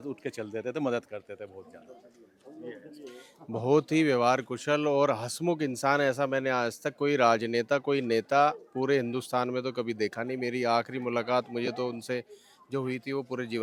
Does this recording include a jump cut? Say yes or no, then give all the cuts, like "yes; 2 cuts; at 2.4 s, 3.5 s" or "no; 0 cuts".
no; 0 cuts